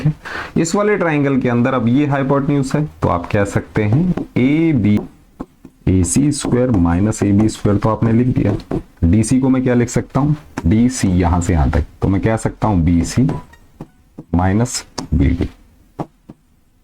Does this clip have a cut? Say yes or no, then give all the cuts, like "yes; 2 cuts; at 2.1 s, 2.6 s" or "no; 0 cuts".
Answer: yes; 1 cut; at 5.0 s